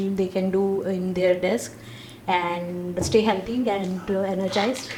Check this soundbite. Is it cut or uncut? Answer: uncut